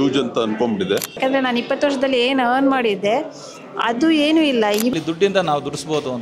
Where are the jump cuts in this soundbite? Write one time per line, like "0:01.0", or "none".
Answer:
0:01.2
0:04.9